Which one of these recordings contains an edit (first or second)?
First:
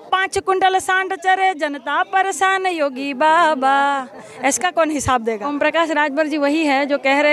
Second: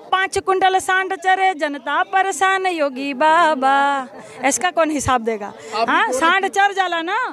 first